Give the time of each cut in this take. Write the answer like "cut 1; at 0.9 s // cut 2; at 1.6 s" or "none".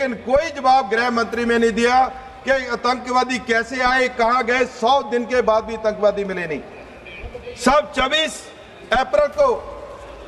none